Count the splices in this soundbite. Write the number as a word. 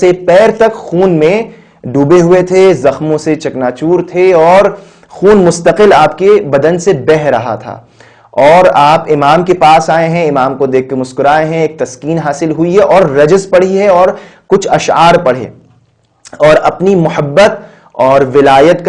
zero